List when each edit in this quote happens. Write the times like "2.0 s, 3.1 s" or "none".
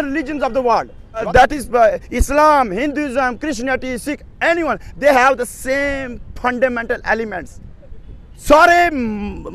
1.3 s